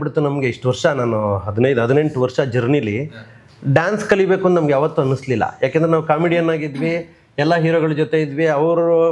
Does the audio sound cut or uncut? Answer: uncut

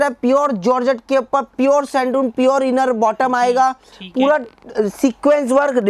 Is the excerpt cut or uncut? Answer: uncut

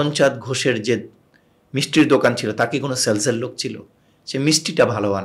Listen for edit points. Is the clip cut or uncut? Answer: uncut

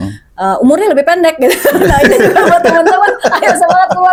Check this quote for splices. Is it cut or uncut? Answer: uncut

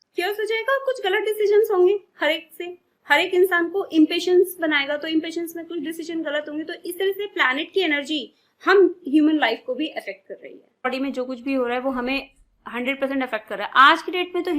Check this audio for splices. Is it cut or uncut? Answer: cut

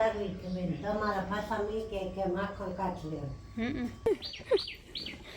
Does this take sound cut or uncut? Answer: cut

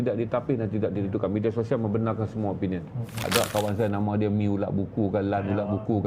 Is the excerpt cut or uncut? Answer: cut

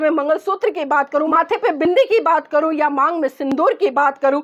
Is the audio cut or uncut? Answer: cut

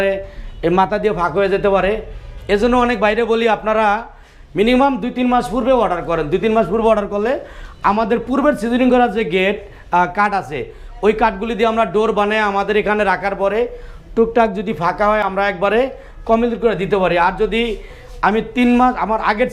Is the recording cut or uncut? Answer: uncut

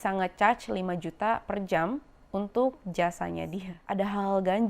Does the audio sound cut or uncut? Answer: cut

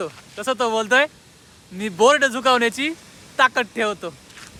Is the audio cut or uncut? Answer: uncut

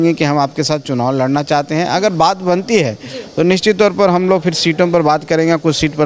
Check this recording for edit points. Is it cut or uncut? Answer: uncut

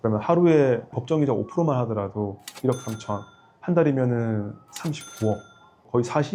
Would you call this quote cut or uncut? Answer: uncut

